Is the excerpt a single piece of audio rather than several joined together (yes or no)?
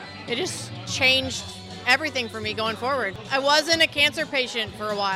no